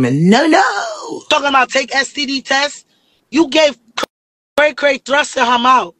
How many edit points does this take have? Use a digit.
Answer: 1